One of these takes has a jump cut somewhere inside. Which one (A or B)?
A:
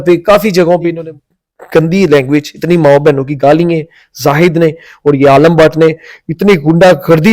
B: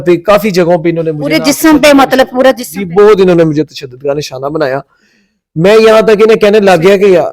A